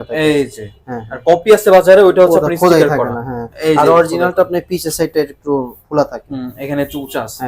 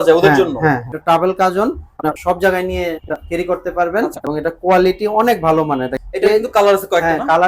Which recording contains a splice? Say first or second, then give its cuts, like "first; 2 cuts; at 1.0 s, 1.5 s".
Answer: second; 5 cuts; at 0.9 s, 2.1 s, 3.2 s, 4.2 s, 6.0 s